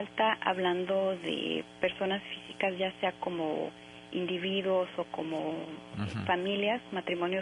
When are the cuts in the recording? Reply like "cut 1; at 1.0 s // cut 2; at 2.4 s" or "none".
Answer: cut 1; at 2.3 s